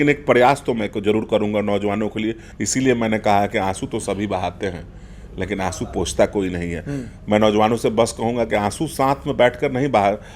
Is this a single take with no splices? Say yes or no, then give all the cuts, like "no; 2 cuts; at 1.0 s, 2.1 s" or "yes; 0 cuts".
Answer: no; 1 cut; at 2.5 s